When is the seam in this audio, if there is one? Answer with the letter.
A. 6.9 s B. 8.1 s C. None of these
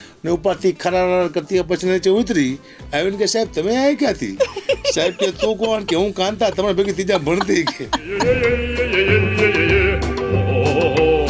B